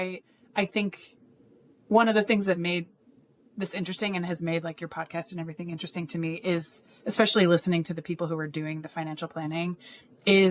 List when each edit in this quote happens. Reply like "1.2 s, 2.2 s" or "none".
none